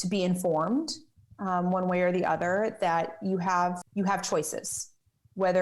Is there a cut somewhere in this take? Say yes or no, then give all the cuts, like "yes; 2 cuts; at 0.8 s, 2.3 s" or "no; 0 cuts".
yes; 1 cut; at 3.8 s